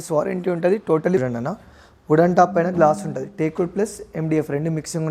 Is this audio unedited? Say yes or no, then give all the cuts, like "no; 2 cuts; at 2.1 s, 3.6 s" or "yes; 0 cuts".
no; 1 cut; at 1.2 s